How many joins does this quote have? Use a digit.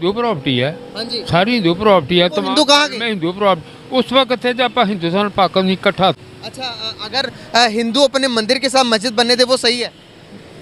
1